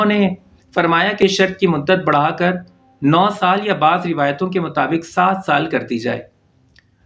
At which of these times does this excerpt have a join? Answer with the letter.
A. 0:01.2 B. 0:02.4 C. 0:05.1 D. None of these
A